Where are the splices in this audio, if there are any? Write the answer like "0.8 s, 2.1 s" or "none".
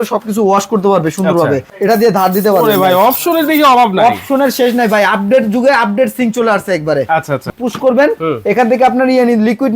1.7 s, 7.5 s

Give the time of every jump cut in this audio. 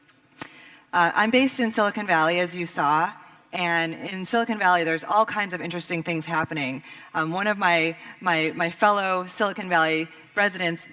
7.8 s

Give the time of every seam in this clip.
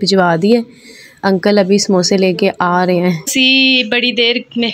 3.3 s

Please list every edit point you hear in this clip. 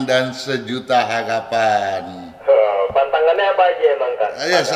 none

